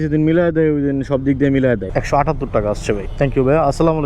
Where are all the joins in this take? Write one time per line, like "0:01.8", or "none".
0:01.9
0:03.1

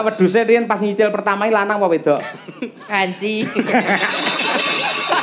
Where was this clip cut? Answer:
none

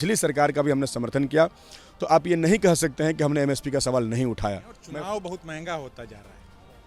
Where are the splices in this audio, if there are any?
0:04.7

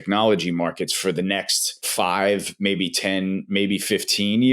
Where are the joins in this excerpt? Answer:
0:01.9

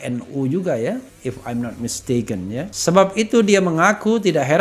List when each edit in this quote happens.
0:02.7

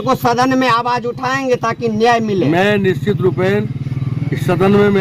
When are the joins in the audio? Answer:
none

